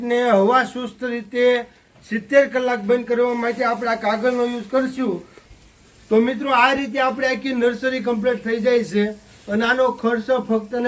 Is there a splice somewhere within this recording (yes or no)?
yes